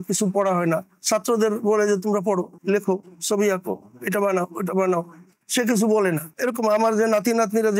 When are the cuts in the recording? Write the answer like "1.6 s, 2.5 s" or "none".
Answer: none